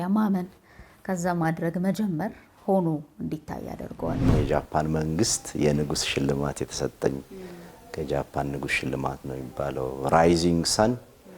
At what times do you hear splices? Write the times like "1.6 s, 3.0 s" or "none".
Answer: 4.3 s

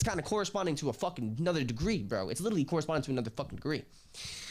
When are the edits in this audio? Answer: none

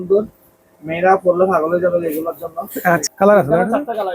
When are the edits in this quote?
3.0 s

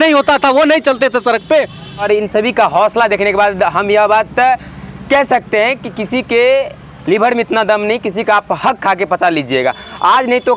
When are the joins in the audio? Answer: 2.0 s

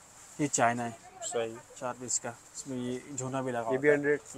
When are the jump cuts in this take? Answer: none

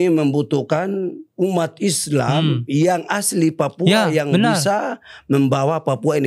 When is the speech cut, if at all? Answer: 1.2 s

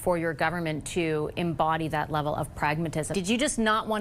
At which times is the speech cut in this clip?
3.1 s

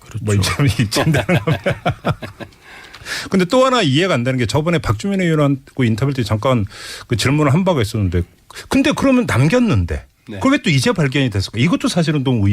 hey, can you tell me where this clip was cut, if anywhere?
4.6 s

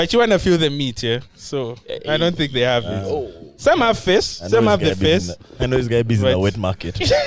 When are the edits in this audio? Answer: none

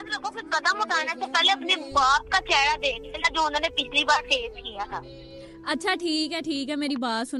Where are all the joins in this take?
none

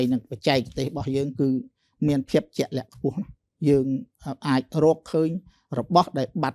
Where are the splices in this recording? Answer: none

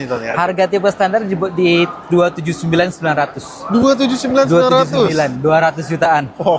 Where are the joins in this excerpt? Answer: none

